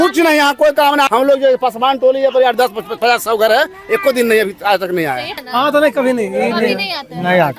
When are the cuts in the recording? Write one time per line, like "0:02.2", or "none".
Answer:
0:01.1
0:05.4